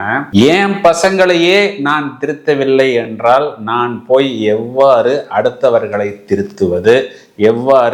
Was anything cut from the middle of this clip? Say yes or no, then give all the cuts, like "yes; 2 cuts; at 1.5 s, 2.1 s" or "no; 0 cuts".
no; 0 cuts